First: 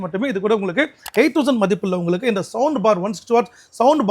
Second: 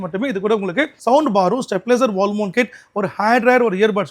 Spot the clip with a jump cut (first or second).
second